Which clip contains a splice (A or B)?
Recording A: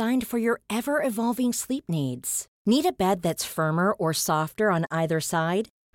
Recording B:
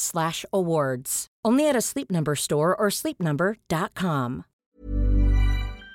B